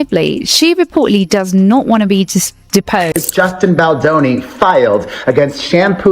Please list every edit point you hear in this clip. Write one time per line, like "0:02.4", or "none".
0:03.1